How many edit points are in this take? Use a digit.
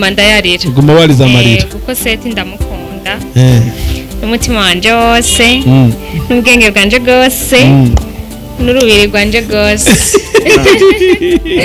0